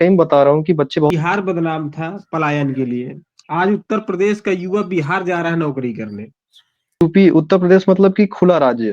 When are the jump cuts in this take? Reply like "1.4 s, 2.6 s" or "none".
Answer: 1.1 s, 7.0 s